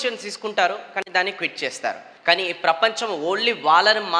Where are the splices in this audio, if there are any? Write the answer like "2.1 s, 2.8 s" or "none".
2.1 s